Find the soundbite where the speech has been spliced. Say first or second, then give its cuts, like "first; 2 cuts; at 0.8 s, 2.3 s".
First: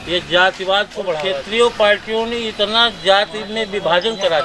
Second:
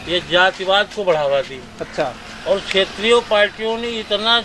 first; 1 cut; at 1.4 s